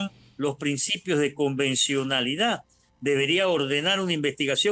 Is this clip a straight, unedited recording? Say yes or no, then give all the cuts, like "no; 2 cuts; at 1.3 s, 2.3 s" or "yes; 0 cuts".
yes; 0 cuts